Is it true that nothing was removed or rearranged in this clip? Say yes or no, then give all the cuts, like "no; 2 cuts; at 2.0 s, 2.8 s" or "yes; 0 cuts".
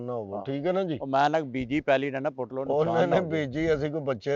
yes; 0 cuts